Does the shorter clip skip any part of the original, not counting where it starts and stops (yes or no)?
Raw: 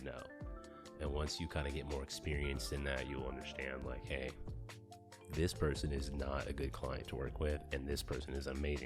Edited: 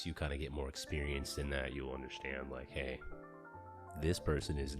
no